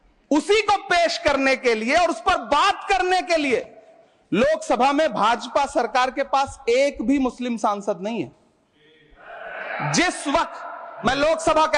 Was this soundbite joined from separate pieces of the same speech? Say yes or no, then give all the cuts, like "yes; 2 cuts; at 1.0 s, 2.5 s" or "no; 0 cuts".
no; 0 cuts